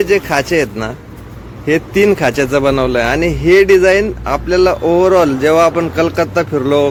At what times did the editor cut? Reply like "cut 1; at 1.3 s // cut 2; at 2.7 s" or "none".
none